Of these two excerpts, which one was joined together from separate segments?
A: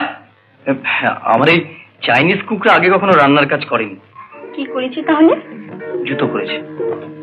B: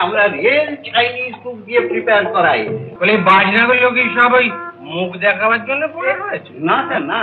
B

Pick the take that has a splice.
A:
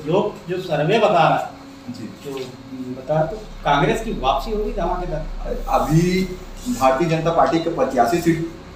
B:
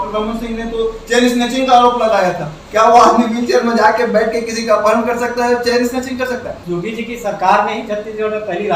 B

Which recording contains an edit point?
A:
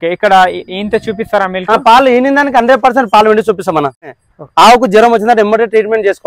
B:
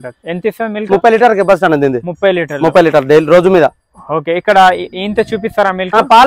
A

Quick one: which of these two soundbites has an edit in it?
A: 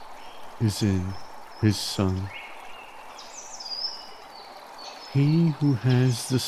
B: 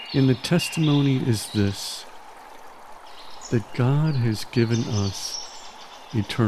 A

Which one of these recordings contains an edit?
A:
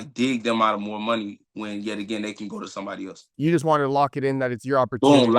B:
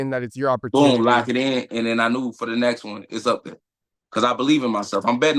A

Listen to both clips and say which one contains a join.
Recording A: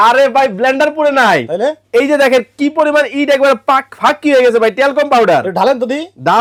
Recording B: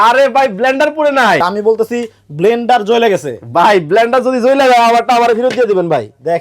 B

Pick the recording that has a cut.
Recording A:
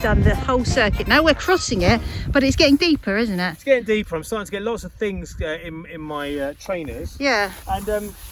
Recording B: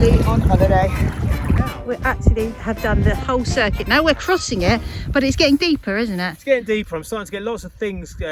B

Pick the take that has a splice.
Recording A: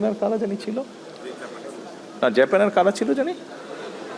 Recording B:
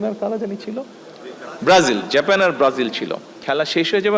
B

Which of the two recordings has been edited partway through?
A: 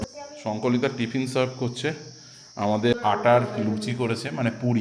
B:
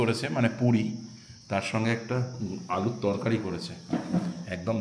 A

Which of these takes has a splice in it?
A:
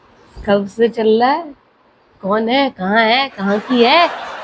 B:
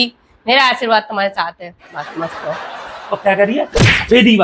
B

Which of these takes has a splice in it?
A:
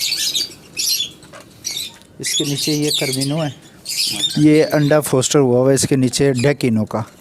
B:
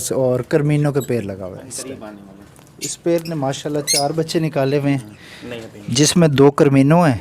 B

